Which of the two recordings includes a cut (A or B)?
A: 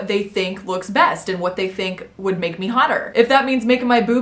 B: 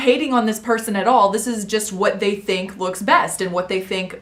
A